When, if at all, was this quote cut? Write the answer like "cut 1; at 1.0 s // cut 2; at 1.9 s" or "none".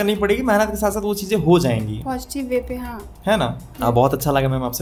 none